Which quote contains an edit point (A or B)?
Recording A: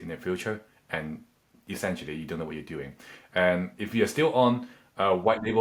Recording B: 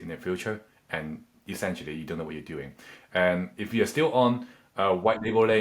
B